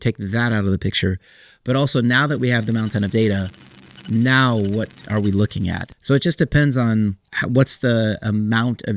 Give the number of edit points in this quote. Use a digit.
2